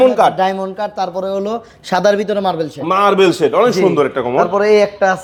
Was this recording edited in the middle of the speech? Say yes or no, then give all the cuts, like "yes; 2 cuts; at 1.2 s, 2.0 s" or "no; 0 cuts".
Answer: no; 0 cuts